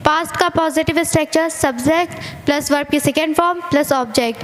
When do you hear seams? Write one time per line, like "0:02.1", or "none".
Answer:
none